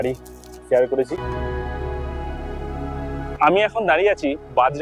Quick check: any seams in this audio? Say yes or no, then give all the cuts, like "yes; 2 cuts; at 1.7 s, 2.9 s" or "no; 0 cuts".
yes; 2 cuts; at 1.2 s, 3.3 s